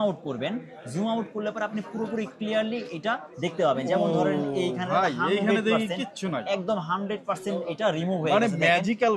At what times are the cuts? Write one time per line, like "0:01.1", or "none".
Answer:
none